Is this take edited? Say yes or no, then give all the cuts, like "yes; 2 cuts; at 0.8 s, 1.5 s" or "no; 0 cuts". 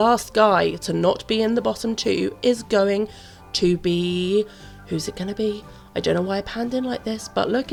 no; 0 cuts